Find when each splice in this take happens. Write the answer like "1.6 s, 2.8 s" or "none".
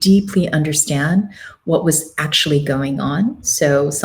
none